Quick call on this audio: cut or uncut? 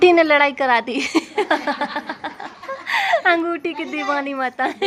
uncut